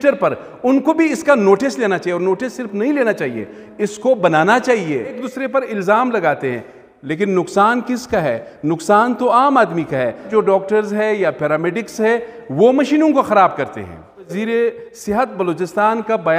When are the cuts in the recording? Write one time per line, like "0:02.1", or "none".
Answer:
0:05.3
0:10.3
0:14.4